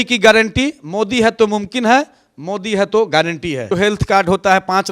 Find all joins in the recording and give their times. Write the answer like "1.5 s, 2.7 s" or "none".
3.7 s